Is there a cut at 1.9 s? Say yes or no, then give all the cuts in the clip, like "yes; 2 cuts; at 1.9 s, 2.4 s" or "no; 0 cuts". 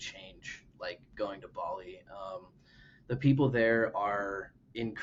no; 0 cuts